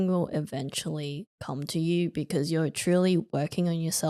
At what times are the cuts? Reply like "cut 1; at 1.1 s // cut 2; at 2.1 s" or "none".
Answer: none